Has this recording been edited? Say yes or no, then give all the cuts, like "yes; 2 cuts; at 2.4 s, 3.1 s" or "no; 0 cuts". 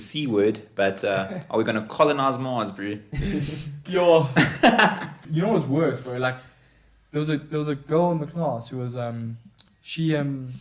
yes; 1 cut; at 5.2 s